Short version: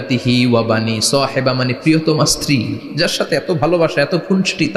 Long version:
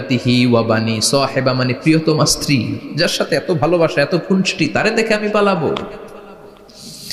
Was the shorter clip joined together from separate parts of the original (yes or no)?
no